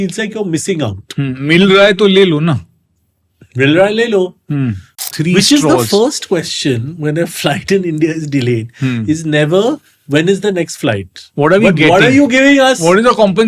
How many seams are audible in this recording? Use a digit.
1